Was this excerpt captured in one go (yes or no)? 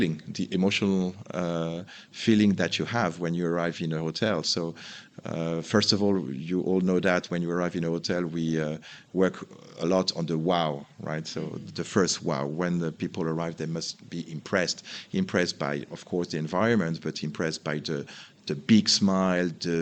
yes